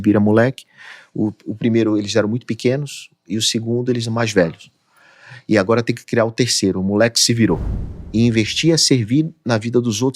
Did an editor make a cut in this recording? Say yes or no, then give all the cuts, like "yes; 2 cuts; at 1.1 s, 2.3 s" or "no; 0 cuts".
yes; 1 cut; at 7.8 s